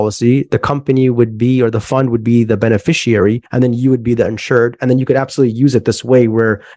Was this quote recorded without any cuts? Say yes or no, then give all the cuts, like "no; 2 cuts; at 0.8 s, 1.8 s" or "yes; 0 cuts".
yes; 0 cuts